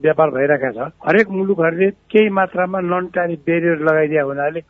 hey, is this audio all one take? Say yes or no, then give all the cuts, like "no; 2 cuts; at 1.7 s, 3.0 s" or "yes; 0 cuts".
yes; 0 cuts